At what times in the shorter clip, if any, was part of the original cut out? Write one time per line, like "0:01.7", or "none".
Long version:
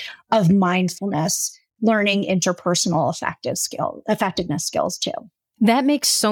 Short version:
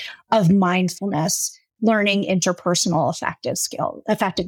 none